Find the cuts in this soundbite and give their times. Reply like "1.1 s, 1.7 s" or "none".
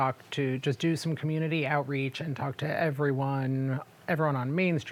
none